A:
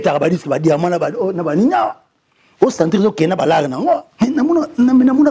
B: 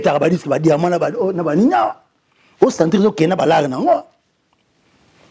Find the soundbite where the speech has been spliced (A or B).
A